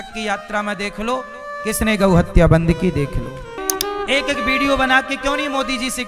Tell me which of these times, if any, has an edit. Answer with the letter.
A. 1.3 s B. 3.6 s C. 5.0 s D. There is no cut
B